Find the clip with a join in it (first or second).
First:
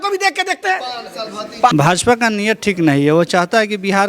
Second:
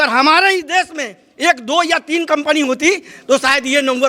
first